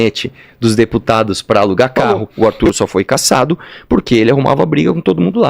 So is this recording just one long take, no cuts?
no; 1 cut; at 2.0 s

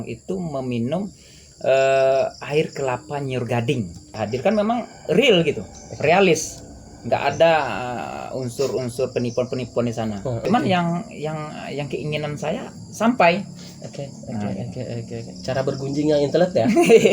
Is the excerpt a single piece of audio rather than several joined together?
no; 2 cuts; at 4.2 s, 10.4 s

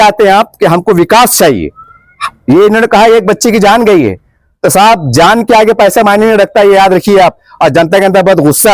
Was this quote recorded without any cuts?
yes; 0 cuts

